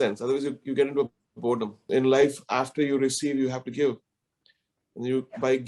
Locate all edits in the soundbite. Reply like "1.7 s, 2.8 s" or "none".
1.8 s